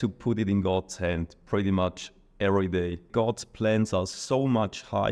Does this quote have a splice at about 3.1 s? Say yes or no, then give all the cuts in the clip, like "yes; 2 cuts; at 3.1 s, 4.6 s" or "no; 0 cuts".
yes; 1 cut; at 3.1 s